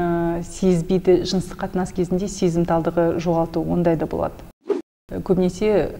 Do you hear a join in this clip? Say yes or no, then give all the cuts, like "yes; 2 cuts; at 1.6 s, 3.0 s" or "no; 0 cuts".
yes; 1 cut; at 4.6 s